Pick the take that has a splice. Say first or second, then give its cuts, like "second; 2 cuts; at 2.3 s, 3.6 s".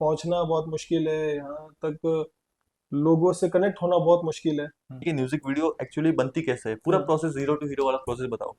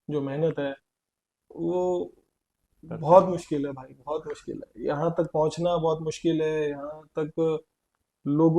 first; 1 cut; at 5.1 s